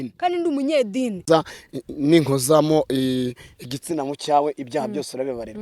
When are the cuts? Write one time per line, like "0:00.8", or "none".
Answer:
0:01.2